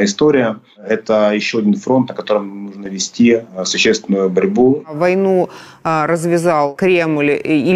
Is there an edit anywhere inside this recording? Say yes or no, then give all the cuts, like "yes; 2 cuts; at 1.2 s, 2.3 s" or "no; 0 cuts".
yes; 3 cuts; at 0.9 s, 4.9 s, 6.7 s